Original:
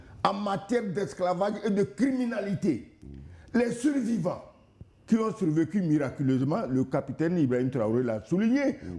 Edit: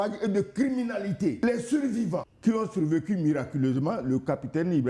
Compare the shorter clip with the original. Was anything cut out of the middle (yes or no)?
yes